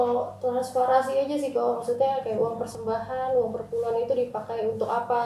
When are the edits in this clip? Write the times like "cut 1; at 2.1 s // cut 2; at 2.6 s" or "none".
none